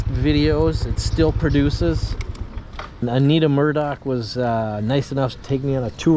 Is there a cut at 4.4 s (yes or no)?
no